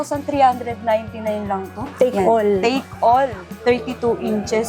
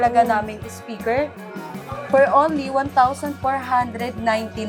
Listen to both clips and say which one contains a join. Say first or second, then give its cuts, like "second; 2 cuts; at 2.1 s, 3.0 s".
first; 2 cuts; at 1.8 s, 3.5 s